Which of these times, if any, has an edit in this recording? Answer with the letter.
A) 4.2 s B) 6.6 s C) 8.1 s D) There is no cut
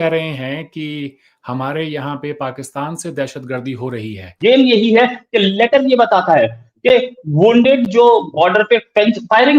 A